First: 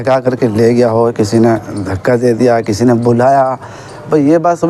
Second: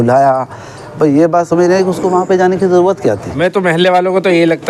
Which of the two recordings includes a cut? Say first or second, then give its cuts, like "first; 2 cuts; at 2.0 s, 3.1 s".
second; 1 cut; at 3.3 s